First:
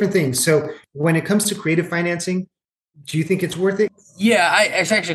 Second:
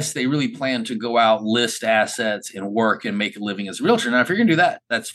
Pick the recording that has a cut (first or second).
first